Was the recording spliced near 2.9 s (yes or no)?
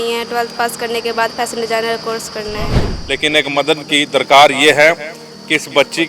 yes